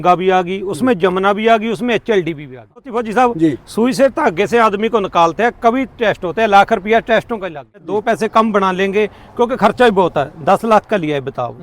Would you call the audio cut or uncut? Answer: cut